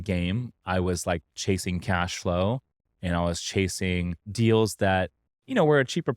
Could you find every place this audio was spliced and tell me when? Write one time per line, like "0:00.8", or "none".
0:04.3